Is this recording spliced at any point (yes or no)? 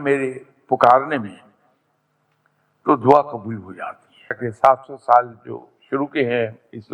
yes